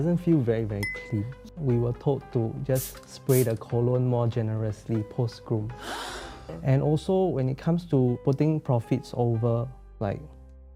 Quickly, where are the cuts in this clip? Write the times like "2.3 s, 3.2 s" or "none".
none